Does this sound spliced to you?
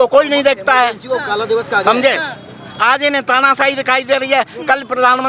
no; 0 cuts

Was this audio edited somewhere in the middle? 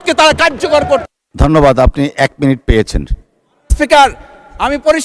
no; 0 cuts

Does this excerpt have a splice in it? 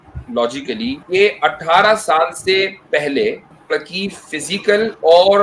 yes; 2 cuts; at 1.0 s, 3.5 s

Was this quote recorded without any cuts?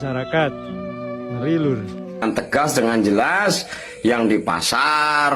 no; 1 cut; at 2.2 s

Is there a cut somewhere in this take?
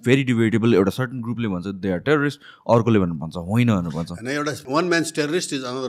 yes; 1 cut; at 4.6 s

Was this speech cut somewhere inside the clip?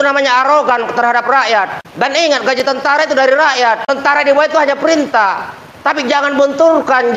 yes; 2 cuts; at 1.8 s, 3.9 s

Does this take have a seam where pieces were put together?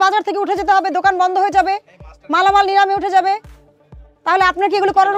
no; 0 cuts

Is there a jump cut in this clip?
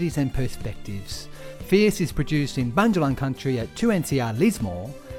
no; 0 cuts

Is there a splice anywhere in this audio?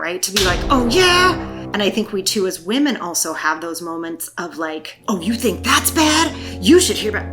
no; 0 cuts

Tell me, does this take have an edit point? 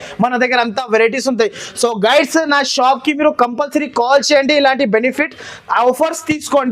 no; 0 cuts

